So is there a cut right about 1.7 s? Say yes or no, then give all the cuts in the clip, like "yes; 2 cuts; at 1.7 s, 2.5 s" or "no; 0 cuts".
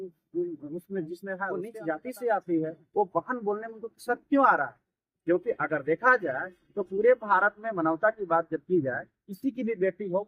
yes; 1 cut; at 1.7 s